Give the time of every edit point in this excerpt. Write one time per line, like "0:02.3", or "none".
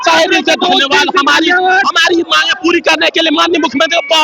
none